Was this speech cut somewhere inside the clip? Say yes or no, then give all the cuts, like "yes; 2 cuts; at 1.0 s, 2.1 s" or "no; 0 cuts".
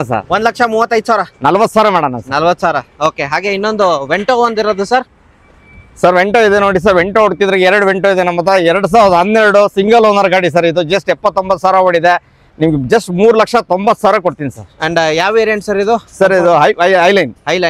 no; 0 cuts